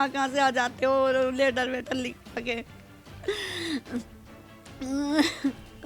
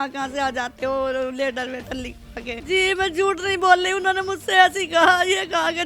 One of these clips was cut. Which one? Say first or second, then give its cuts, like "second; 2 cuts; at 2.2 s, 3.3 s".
second; 1 cut; at 2.6 s